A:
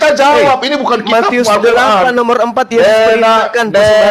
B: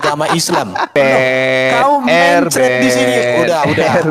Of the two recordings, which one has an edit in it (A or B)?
B